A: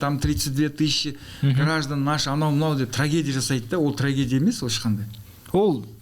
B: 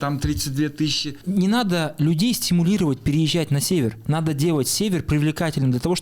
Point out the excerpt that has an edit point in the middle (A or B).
B